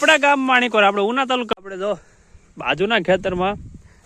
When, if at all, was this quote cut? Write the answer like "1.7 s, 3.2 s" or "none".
1.5 s

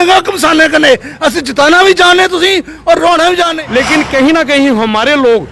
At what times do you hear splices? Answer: 3.5 s

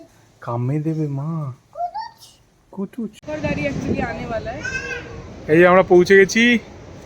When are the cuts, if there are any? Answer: 3.2 s

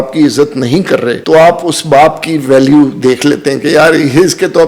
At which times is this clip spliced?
1.2 s

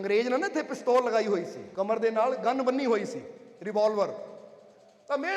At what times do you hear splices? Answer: 1.6 s

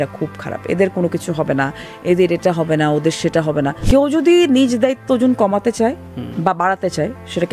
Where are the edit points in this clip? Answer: 3.8 s

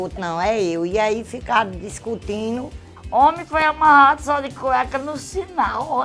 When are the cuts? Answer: 3.0 s

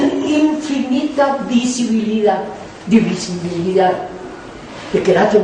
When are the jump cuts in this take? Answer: 1.5 s

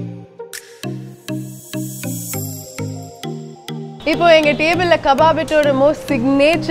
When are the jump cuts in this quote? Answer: 3.9 s

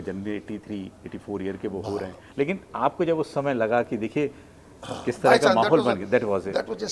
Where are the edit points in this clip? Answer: none

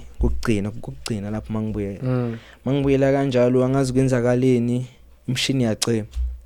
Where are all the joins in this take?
none

